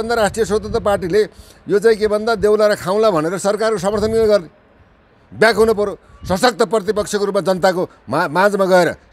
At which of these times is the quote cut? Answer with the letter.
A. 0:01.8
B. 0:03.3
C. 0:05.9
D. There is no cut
D